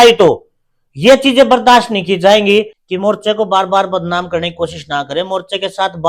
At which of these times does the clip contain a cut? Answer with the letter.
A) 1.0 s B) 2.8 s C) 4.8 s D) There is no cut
B